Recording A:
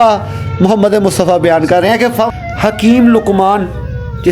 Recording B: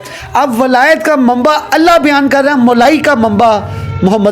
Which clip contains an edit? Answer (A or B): A